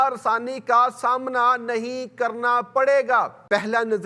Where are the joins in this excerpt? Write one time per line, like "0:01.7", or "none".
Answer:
0:03.1